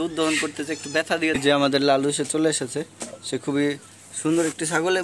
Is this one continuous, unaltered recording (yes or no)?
no